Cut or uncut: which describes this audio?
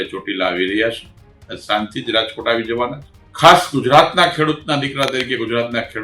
uncut